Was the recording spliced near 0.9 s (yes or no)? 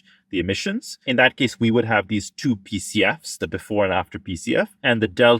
yes